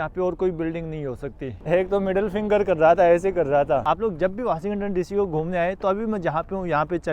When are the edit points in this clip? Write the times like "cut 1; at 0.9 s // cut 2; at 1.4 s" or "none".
cut 1; at 1.5 s // cut 2; at 3.8 s